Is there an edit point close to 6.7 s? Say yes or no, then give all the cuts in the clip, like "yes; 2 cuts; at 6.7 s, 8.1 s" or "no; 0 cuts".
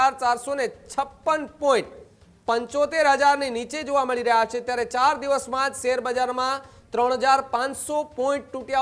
no; 0 cuts